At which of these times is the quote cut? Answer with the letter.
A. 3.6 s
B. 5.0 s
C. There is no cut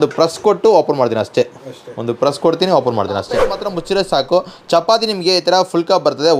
A